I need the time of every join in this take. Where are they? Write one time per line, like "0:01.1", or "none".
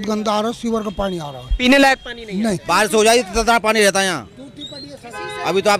0:02.6